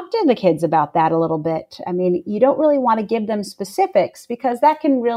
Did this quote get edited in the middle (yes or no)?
no